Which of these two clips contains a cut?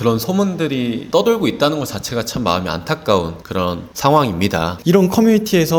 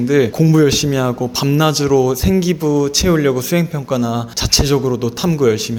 first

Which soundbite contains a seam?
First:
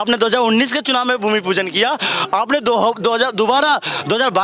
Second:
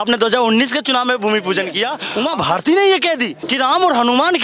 second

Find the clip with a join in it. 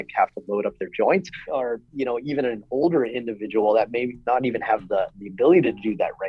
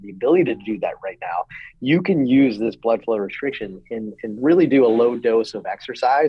first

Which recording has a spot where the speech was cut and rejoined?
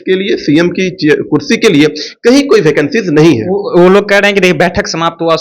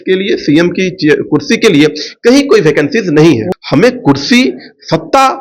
second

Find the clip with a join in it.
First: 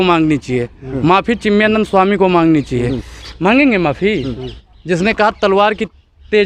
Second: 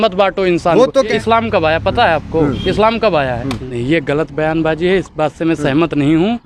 second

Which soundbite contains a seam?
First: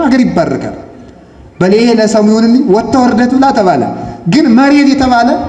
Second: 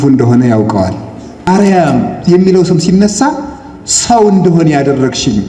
second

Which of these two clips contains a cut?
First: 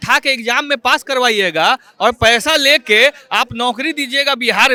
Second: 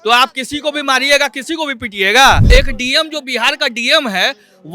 second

